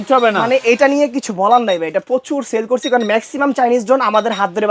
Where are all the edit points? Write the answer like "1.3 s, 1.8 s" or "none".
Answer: none